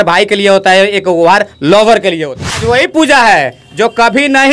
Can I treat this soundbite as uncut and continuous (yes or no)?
no